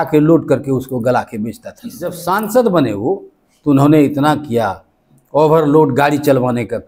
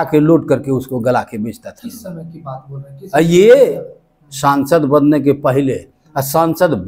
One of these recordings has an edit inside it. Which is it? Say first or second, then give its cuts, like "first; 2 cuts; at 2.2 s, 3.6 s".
first; 1 cut; at 2.2 s